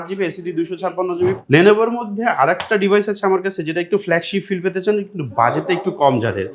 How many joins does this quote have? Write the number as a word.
one